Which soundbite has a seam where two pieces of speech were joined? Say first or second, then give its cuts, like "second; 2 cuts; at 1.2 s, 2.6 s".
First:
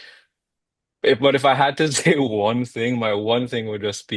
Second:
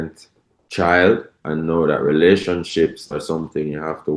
second; 1 cut; at 1.4 s